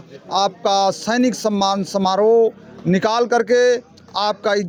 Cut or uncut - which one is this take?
uncut